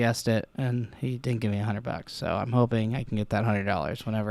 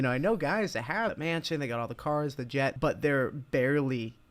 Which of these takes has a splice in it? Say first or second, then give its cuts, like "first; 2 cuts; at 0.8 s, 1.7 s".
second; 2 cuts; at 1.1 s, 2.8 s